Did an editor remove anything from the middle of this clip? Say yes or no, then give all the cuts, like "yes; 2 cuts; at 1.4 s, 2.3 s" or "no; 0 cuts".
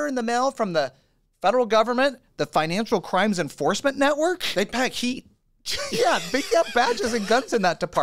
no; 0 cuts